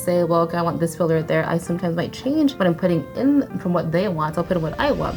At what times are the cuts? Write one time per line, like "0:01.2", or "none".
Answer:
none